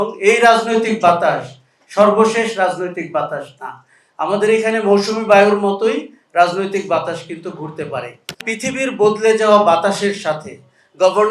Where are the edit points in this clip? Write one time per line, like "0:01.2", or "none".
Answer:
0:08.4